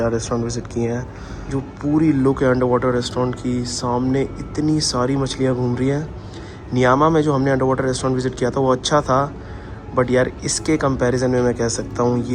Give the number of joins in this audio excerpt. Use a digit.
0